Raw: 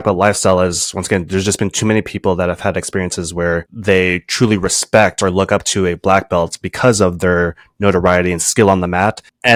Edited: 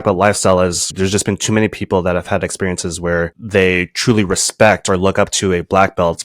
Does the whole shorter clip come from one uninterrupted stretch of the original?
no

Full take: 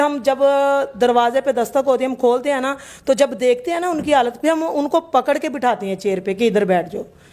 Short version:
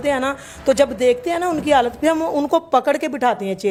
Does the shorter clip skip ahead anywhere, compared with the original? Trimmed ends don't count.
no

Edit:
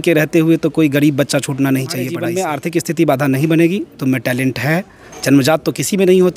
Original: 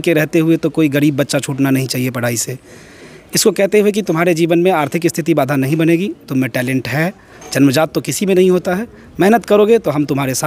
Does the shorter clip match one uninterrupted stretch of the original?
no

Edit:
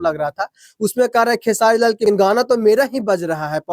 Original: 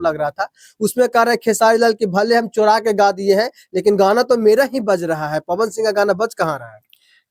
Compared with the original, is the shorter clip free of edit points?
no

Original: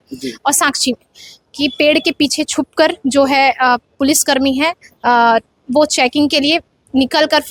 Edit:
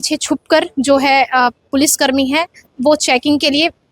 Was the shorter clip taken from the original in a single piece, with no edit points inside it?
no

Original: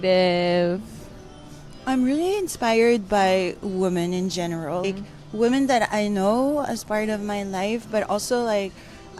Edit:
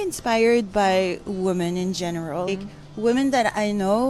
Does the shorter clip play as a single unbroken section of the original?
yes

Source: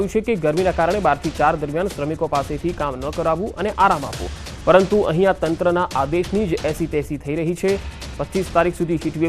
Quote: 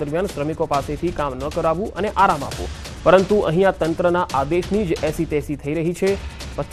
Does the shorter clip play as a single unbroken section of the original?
yes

